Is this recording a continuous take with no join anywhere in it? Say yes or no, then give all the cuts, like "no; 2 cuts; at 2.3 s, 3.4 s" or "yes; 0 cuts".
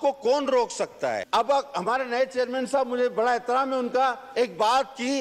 no; 1 cut; at 1.2 s